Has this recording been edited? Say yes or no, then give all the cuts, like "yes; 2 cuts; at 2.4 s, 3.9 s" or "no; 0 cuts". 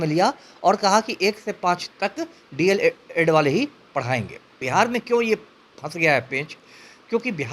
yes; 1 cut; at 4.6 s